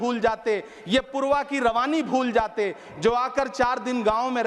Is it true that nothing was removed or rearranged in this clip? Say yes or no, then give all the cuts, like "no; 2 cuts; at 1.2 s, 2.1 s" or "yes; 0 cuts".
yes; 0 cuts